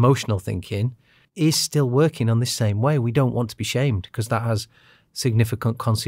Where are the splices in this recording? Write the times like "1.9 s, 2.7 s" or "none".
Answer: 1.2 s